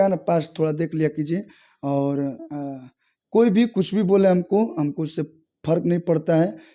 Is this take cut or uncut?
uncut